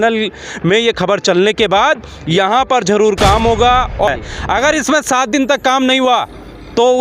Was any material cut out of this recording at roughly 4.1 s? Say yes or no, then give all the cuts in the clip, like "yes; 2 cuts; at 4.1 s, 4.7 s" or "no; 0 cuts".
yes; 1 cut; at 4.1 s